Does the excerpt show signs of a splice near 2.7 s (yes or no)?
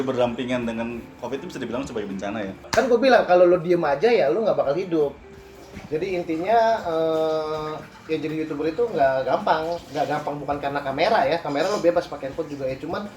yes